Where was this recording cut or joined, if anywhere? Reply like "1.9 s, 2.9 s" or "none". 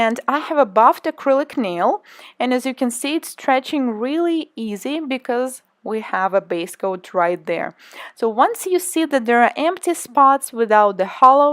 4.5 s